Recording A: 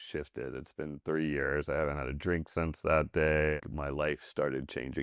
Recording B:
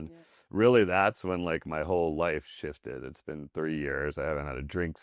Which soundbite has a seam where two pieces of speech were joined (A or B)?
A